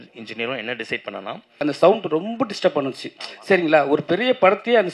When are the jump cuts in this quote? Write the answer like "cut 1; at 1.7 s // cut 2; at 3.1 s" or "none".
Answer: cut 1; at 1.6 s